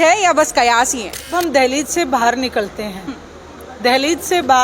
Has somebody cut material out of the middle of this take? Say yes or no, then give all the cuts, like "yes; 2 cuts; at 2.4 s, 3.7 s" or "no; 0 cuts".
yes; 1 cut; at 1.3 s